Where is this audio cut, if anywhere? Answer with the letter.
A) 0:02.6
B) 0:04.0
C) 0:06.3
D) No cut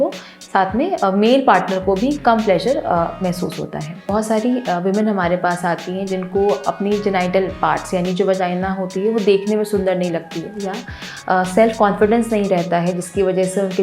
B